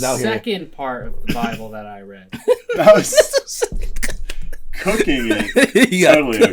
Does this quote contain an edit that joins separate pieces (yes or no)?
no